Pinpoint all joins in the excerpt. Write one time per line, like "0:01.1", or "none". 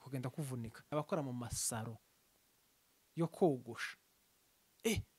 0:00.9